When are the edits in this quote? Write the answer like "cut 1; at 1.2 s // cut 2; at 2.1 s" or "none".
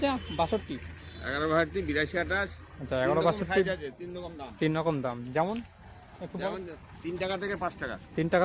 none